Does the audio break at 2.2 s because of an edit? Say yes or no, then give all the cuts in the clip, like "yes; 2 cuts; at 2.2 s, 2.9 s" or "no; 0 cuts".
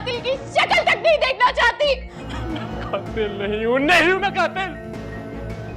yes; 1 cut; at 2.2 s